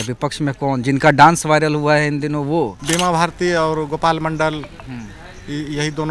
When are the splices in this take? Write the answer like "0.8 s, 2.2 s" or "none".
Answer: 2.8 s